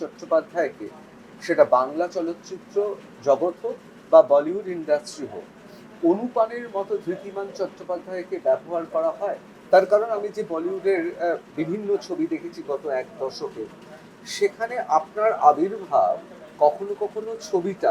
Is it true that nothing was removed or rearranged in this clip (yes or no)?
yes